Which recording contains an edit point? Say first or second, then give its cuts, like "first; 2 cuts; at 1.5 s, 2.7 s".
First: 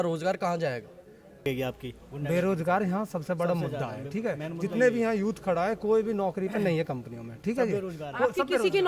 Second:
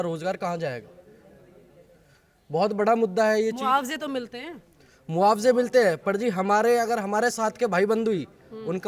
first; 1 cut; at 1.5 s